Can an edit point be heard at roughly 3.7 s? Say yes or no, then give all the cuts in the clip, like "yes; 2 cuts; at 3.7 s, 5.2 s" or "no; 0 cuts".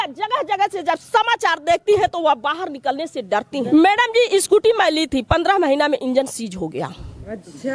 yes; 1 cut; at 3.7 s